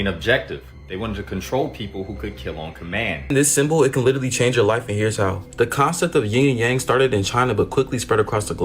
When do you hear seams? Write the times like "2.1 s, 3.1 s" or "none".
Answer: 3.3 s